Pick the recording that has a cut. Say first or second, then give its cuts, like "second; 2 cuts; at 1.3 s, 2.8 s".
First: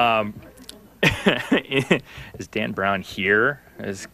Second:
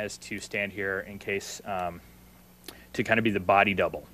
first; 1 cut; at 2.3 s